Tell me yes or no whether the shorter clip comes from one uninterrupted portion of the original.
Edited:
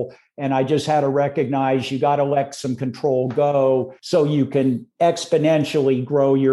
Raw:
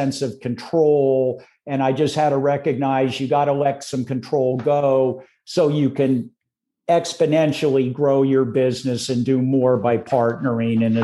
no